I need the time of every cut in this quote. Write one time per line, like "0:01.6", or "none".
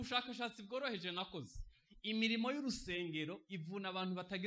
none